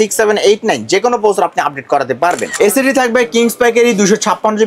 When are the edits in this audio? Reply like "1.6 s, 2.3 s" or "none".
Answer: 2.5 s